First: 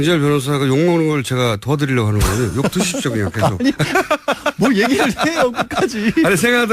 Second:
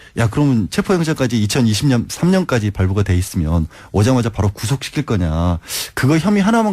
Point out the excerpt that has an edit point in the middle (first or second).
first